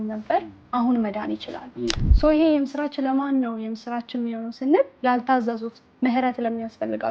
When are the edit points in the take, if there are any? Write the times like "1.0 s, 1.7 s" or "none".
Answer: 2.0 s

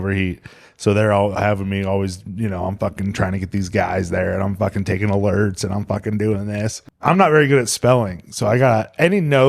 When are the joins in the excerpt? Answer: 6.9 s

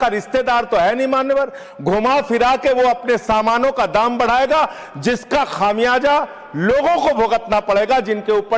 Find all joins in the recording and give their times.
none

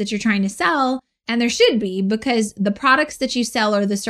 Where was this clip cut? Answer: 1.1 s

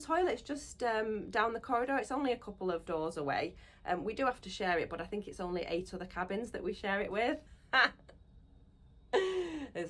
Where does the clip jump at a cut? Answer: 2.8 s, 7.5 s

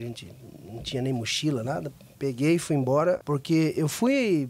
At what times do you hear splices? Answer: 3.2 s

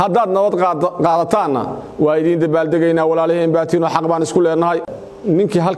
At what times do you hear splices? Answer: 4.8 s

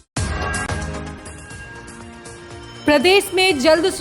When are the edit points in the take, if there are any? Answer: 1.1 s

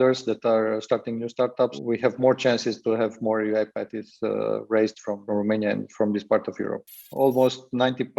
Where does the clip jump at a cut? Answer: 5.2 s, 6.9 s

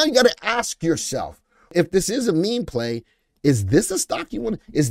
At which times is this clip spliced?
1.7 s

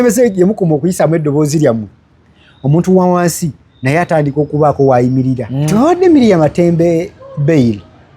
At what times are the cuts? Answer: 5.7 s

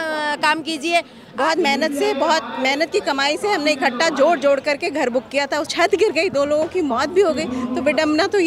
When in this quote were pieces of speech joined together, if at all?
1.2 s, 5.7 s

